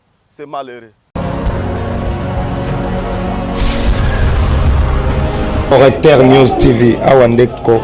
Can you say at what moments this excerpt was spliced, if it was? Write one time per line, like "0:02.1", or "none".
0:01.0